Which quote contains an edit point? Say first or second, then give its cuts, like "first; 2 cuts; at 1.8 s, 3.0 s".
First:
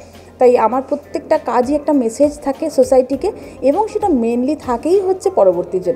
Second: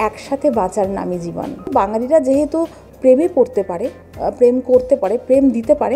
second; 1 cut; at 1.7 s